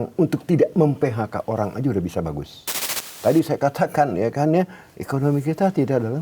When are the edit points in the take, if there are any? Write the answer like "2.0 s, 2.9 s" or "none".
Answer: 3.1 s